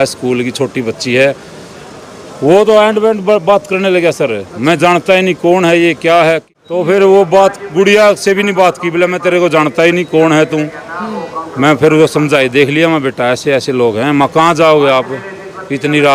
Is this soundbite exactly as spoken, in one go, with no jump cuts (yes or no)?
no